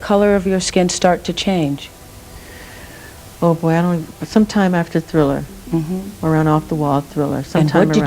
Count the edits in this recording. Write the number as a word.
zero